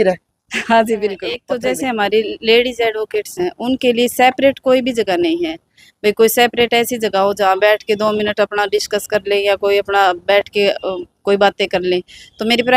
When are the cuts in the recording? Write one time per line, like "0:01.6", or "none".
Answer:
0:01.3